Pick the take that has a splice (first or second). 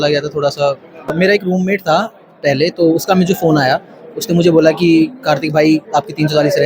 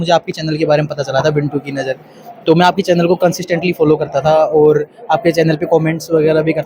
first